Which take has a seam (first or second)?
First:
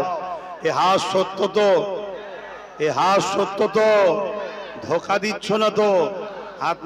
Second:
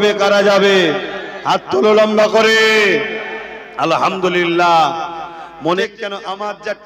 second